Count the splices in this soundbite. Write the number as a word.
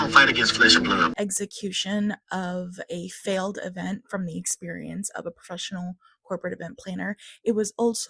one